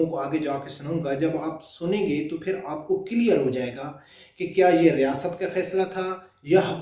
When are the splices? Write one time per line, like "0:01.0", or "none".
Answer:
none